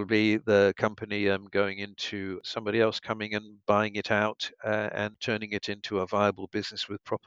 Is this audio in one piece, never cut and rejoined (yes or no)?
no